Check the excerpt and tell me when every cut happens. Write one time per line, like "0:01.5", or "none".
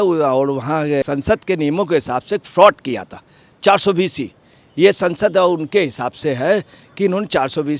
0:01.0